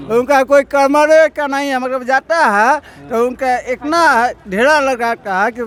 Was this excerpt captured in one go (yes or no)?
yes